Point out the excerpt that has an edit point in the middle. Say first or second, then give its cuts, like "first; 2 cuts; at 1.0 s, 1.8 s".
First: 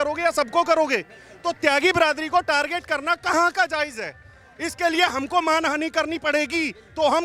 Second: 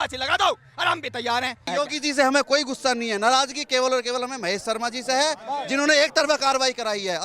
second; 1 cut; at 1.7 s